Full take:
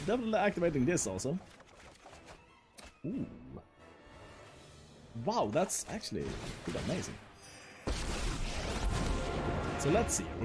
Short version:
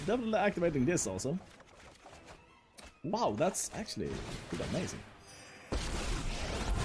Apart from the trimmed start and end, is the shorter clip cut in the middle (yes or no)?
yes